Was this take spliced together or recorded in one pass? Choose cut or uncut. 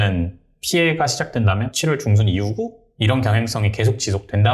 cut